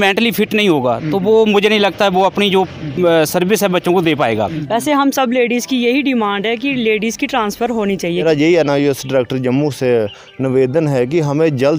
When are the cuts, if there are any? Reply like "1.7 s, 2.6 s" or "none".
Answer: 4.6 s, 8.2 s